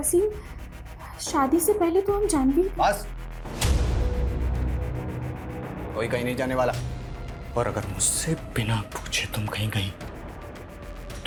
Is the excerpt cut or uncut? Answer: uncut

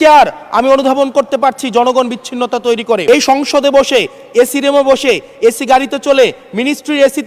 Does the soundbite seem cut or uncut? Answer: cut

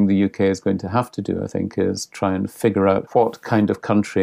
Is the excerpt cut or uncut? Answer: uncut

